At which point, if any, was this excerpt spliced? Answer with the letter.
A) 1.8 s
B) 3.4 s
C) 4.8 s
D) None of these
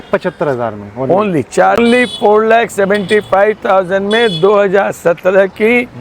A